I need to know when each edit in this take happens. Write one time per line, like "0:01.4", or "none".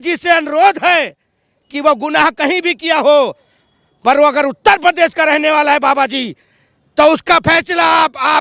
none